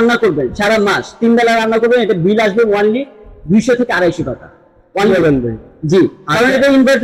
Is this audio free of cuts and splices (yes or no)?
yes